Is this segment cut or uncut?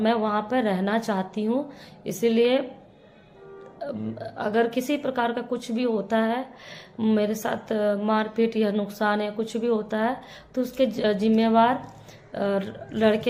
uncut